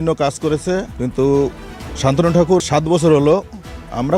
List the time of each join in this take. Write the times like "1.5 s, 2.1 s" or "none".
0.9 s, 2.6 s